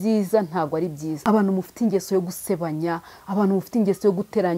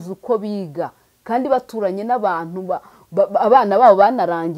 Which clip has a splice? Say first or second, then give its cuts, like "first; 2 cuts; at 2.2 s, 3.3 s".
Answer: first; 1 cut; at 1.1 s